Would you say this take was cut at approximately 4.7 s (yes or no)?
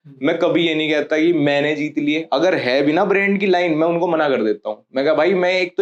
no